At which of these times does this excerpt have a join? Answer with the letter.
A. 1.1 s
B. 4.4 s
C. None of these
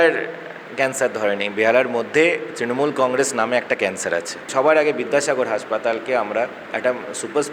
B